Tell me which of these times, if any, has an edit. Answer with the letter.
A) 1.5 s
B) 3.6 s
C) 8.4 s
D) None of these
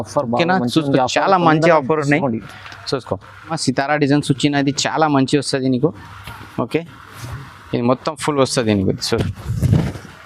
B